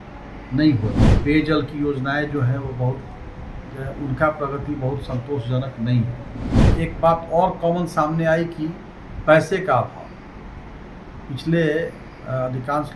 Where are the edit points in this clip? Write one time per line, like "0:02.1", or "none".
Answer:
0:01.1
0:06.7